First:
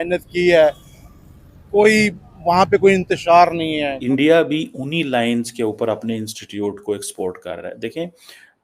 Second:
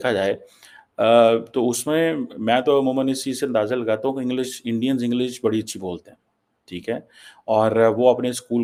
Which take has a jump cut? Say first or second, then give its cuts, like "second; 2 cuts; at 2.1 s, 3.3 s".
first; 1 cut; at 4.0 s